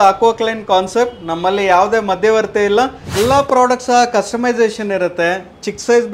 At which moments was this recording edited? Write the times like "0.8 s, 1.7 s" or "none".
3.0 s